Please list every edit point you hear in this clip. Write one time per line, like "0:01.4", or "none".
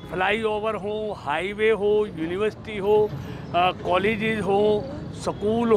none